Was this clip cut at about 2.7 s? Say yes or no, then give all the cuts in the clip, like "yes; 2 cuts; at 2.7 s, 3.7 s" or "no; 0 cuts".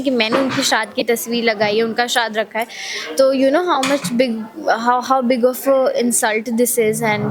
no; 0 cuts